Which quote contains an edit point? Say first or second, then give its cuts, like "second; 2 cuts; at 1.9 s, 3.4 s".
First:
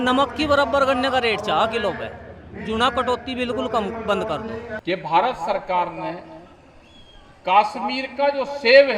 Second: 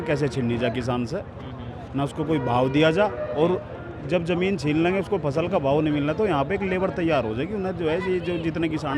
first; 1 cut; at 4.7 s